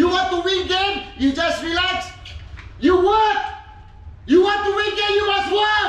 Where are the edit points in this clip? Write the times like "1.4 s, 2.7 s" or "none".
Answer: none